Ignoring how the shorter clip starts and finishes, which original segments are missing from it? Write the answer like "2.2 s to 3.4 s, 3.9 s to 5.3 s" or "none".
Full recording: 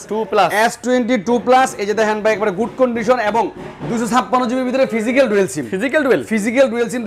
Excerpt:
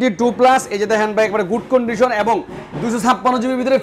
none